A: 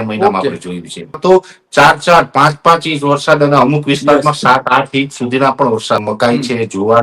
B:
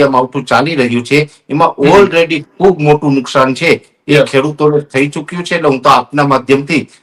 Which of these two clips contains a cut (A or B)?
A